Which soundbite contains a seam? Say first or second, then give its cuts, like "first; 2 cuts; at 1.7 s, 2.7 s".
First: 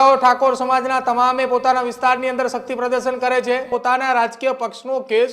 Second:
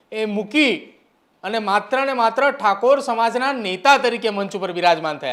first; 1 cut; at 3.7 s